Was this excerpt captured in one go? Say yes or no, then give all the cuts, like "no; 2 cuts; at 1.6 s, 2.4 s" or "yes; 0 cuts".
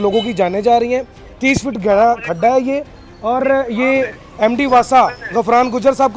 yes; 0 cuts